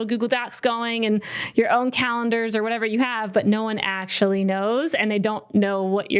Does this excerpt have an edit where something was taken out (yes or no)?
no